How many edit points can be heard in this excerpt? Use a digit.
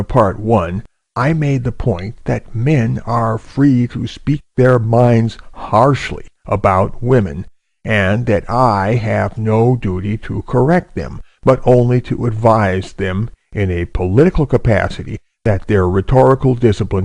1